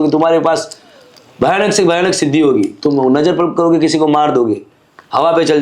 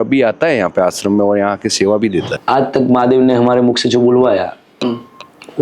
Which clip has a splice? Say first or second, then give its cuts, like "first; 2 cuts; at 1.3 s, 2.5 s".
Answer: second; 1 cut; at 2.4 s